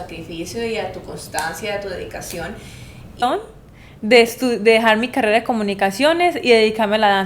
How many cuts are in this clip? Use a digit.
1